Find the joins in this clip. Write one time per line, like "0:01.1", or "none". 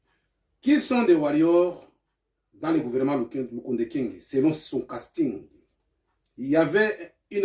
none